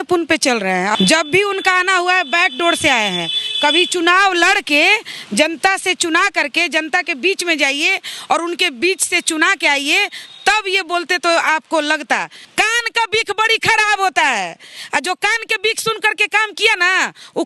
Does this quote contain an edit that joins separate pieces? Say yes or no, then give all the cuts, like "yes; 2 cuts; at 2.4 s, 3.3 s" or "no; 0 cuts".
yes; 2 cuts; at 0.9 s, 12.4 s